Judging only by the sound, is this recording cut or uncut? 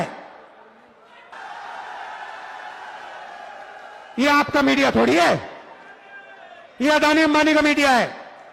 cut